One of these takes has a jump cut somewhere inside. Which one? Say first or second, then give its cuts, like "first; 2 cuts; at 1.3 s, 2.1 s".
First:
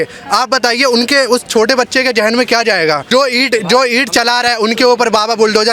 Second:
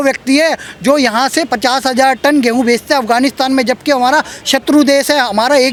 first; 1 cut; at 3.1 s